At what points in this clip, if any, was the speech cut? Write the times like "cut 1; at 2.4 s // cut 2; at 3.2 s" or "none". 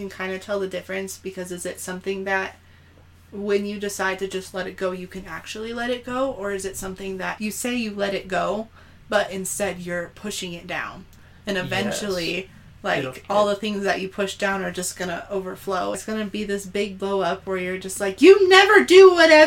cut 1; at 7.3 s // cut 2; at 16.0 s